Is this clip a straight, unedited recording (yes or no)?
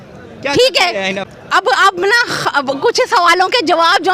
no